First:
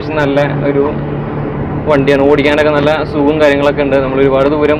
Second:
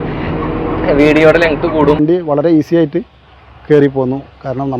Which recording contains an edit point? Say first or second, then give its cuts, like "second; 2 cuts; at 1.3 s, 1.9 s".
second; 1 cut; at 2.0 s